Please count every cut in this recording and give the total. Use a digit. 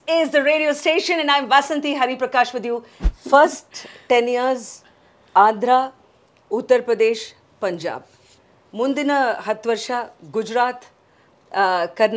1